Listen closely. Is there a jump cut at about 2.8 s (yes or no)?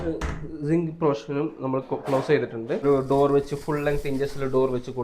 yes